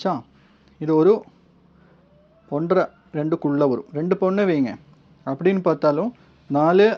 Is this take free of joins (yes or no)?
yes